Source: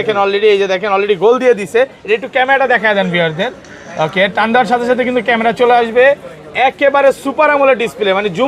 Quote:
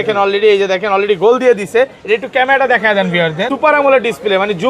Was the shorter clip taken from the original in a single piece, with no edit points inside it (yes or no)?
no